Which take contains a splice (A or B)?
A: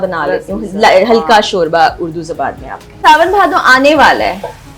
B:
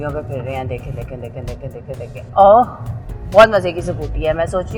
A